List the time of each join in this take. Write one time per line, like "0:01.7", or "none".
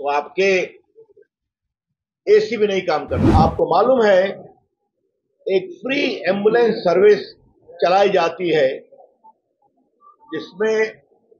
0:03.2

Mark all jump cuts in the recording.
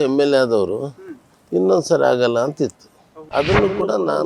0:03.0

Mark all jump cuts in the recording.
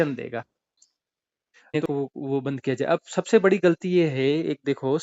0:01.8

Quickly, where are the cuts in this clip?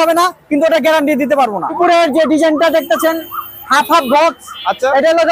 0:01.7

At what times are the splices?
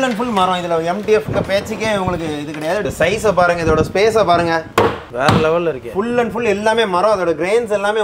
0:02.9
0:04.8

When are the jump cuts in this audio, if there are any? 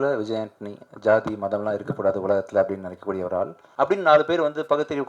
0:03.6

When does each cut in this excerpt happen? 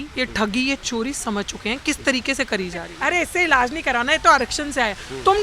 0:02.9

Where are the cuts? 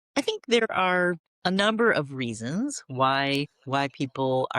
0:01.3

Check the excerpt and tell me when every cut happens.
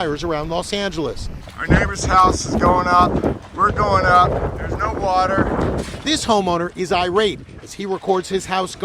0:04.0

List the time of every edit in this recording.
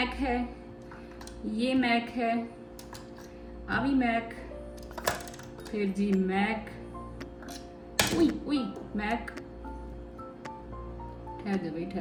none

